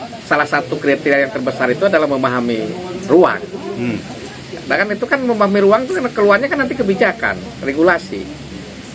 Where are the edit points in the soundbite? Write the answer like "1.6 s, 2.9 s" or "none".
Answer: none